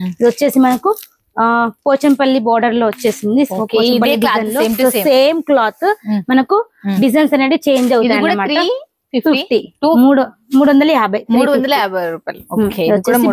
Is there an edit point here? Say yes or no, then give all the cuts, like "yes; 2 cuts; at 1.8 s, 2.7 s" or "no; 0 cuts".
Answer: no; 0 cuts